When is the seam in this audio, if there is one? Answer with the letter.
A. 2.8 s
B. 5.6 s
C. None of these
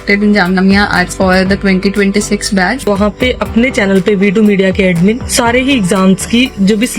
A